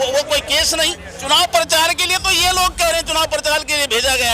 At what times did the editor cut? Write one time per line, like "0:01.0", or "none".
0:01.1